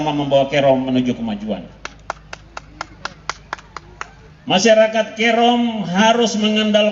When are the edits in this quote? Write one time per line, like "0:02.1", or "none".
0:04.2